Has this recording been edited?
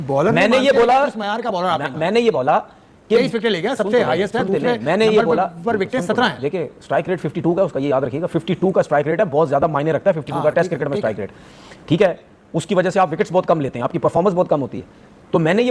no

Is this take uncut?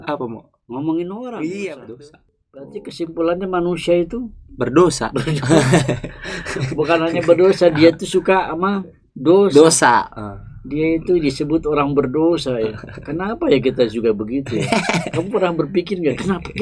no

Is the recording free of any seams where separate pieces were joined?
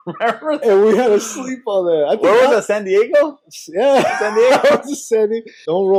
yes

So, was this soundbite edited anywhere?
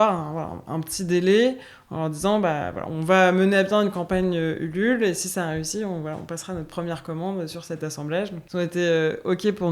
yes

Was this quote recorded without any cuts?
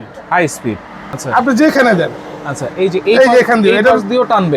no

